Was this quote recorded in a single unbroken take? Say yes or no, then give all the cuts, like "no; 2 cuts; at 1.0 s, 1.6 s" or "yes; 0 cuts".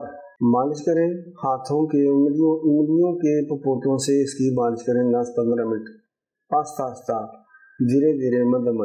yes; 0 cuts